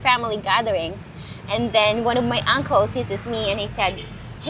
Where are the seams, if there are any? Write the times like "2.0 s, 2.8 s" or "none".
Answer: none